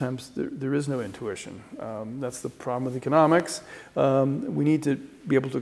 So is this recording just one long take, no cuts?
yes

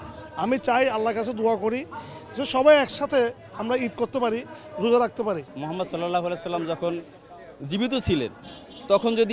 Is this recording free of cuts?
no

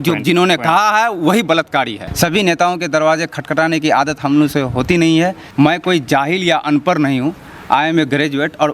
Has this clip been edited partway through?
yes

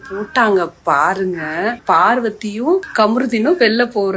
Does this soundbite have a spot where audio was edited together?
yes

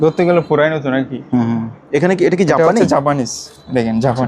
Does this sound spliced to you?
no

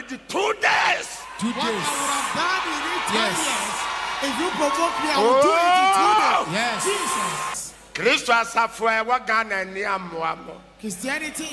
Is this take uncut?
no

